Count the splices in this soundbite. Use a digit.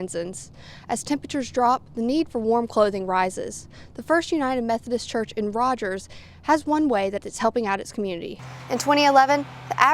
1